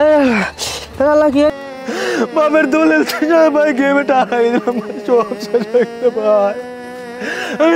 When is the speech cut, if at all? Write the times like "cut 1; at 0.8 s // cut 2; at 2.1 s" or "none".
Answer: cut 1; at 1.5 s